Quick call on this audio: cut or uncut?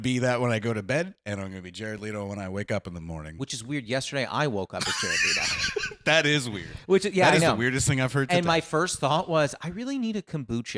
uncut